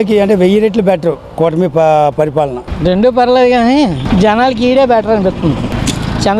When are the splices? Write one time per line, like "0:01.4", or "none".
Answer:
0:02.6